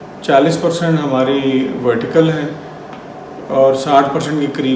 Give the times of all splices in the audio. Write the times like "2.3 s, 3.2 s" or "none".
none